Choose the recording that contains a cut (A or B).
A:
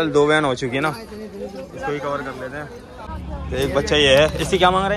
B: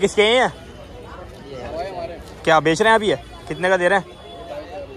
A